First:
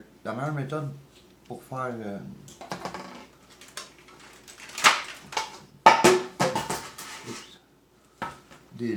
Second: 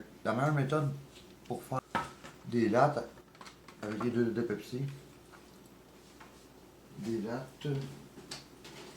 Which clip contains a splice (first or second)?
second